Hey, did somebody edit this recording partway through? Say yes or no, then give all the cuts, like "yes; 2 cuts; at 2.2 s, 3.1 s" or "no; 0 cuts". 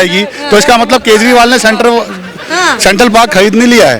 no; 0 cuts